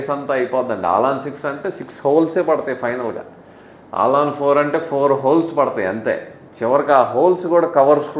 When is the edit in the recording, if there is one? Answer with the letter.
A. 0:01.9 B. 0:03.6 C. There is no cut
C